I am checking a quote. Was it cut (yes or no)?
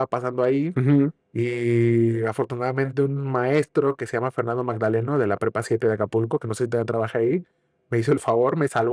no